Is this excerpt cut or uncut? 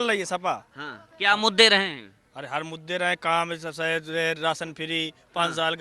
uncut